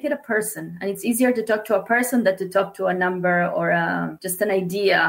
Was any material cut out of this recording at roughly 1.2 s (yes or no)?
no